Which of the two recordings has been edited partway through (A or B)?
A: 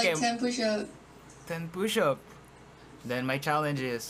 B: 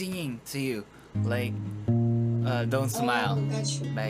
A